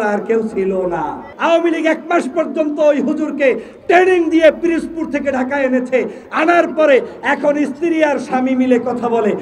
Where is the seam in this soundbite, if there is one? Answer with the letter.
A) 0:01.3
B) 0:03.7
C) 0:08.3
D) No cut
A